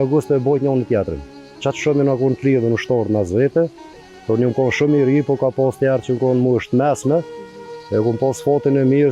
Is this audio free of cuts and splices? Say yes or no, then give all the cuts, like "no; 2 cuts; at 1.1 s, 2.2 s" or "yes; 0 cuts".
yes; 0 cuts